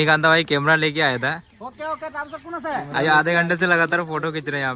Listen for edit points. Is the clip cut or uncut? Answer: uncut